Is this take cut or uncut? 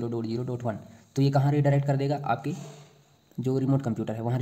uncut